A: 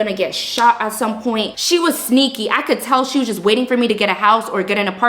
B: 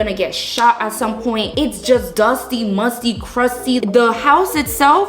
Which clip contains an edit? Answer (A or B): A